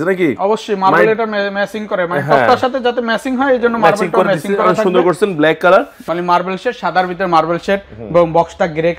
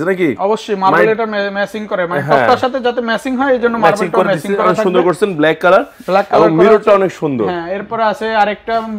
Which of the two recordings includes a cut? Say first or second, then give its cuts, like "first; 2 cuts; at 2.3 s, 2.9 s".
first; 1 cut; at 6.0 s